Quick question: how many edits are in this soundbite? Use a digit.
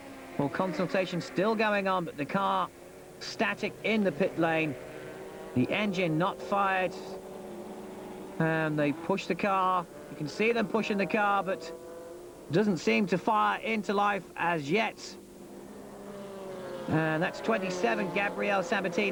0